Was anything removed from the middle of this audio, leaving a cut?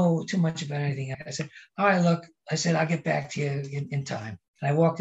yes; 2 cuts; at 1.1 s, 4.1 s

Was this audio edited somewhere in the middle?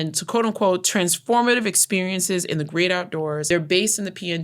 yes; 1 cut; at 3.4 s

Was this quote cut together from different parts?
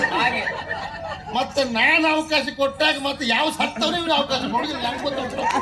no; 0 cuts

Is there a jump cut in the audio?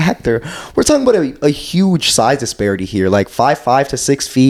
no; 0 cuts

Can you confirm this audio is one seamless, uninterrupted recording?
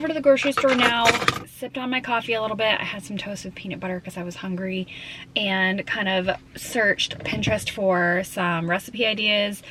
yes; 0 cuts

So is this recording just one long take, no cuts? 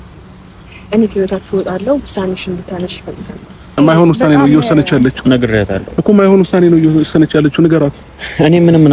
no; 1 cut; at 3.7 s

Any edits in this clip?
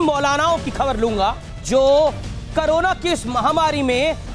yes; 1 cut; at 1.6 s

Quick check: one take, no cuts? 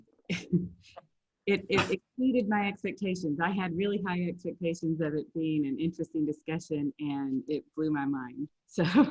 yes; 0 cuts

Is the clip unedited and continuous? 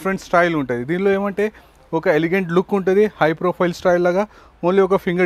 yes; 0 cuts

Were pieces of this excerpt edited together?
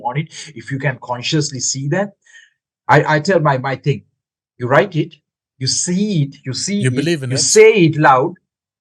no; 0 cuts

